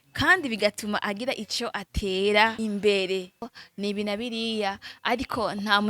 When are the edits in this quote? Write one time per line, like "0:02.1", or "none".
0:02.6
0:03.5